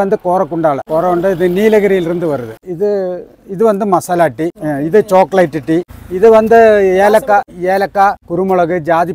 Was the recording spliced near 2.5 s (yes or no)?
yes